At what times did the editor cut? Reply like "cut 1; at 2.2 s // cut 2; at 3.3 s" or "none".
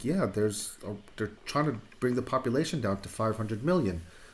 cut 1; at 1.4 s